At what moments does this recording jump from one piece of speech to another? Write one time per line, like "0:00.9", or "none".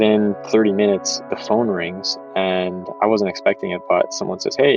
none